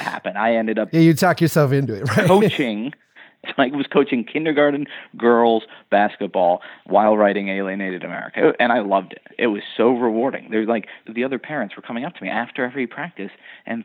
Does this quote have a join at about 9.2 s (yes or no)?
yes